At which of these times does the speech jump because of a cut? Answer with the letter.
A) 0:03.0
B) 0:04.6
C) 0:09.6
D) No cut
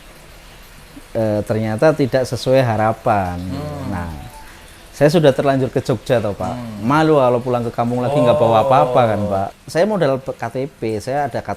C